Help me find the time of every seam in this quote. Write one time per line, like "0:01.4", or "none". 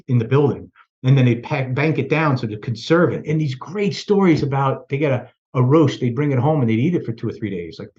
0:03.2